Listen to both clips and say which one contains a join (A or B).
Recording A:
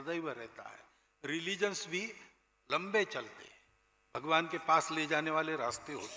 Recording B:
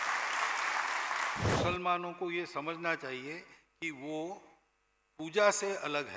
B